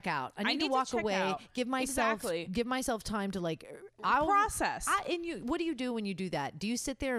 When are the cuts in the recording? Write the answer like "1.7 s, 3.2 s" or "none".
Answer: none